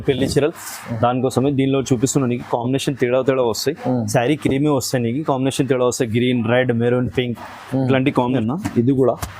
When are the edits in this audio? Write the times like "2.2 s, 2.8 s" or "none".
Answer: 8.4 s